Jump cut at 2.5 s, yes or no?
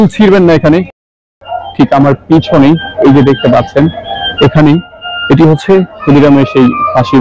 no